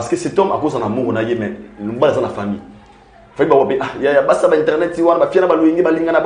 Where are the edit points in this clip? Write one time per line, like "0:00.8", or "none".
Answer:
none